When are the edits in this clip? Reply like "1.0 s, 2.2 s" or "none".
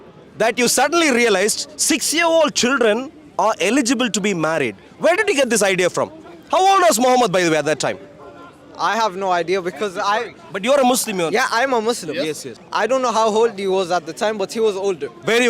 12.5 s